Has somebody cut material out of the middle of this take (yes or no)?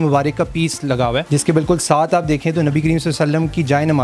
yes